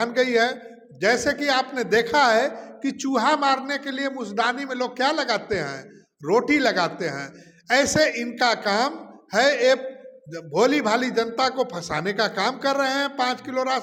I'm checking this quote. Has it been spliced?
no; 0 cuts

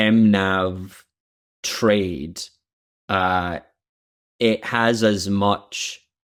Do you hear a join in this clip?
no; 0 cuts

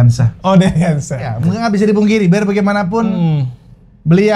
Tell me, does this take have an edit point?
yes; 1 cut; at 1.4 s

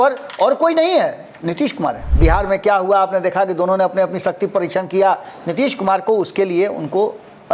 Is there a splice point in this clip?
yes; 1 cut; at 2.0 s

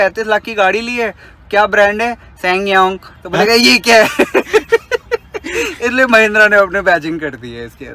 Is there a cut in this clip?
no; 0 cuts

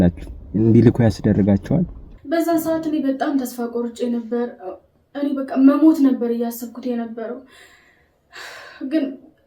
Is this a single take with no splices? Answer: no; 1 cut; at 2.0 s

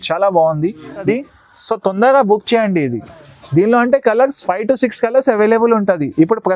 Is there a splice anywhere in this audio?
yes; 1 cut; at 1.0 s

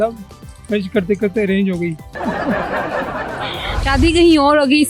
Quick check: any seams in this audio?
yes; 2 cuts; at 2.1 s, 3.8 s

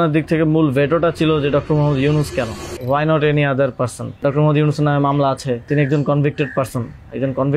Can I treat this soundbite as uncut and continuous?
no; 3 cuts; at 2.7 s, 4.2 s, 5.7 s

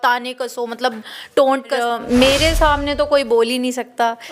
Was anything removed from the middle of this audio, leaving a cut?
yes; 1 cut; at 1.8 s

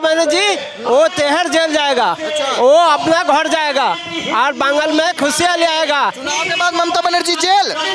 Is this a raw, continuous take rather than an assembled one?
yes; 0 cuts

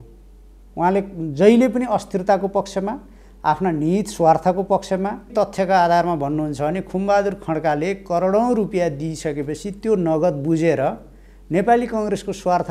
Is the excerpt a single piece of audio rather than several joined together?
no; 1 cut; at 5.3 s

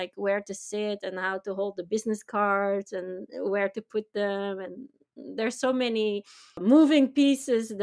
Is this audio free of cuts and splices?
yes; 0 cuts

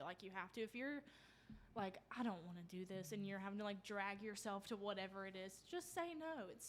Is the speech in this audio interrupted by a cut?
no; 0 cuts

